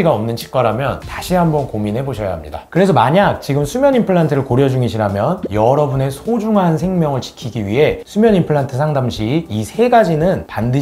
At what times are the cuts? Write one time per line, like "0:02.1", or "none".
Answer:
0:01.0
0:02.5